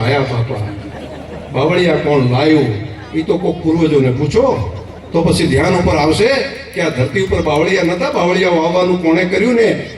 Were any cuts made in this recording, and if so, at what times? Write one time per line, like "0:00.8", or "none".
none